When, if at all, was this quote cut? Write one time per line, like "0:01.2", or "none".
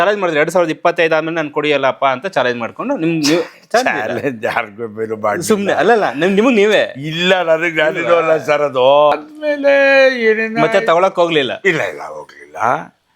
0:09.1